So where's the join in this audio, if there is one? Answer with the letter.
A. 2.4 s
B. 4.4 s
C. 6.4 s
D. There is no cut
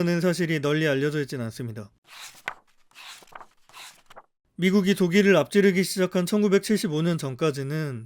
B